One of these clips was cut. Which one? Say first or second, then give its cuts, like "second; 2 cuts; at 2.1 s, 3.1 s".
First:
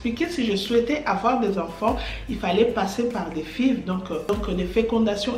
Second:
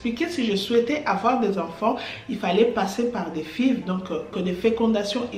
second; 1 cut; at 4.3 s